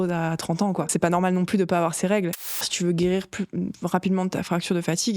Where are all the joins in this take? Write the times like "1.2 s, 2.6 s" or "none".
0.9 s, 2.6 s